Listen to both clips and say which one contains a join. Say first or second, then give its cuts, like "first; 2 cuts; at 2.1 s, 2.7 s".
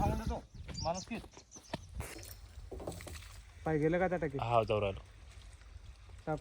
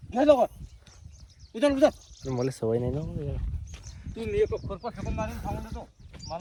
first; 1 cut; at 2.1 s